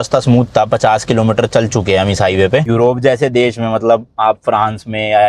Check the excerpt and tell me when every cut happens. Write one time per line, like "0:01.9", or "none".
0:02.7